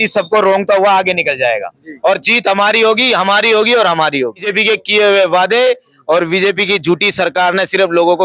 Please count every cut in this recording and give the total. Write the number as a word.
one